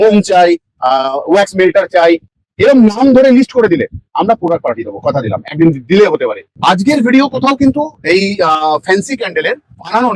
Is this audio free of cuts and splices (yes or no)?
no